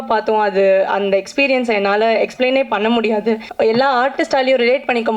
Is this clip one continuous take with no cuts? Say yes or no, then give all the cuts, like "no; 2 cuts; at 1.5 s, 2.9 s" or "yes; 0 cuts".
no; 1 cut; at 3.5 s